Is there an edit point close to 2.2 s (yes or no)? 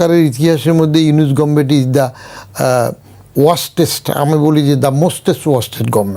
no